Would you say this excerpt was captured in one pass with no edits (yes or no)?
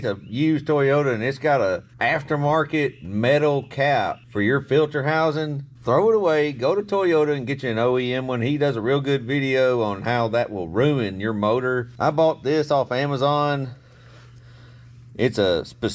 yes